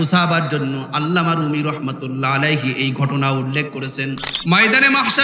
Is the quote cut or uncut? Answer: cut